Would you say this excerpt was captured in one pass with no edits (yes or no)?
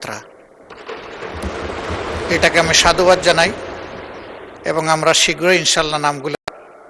yes